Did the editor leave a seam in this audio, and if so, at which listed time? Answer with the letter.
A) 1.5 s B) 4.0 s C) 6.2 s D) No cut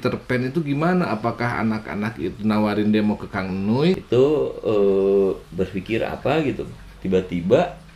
B